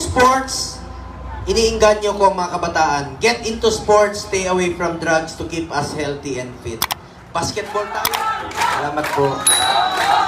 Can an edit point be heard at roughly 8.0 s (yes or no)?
yes